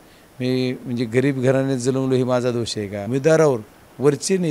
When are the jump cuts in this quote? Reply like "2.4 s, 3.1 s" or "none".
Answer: 3.0 s